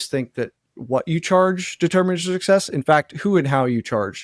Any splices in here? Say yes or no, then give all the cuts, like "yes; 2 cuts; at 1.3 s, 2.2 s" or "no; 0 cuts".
no; 0 cuts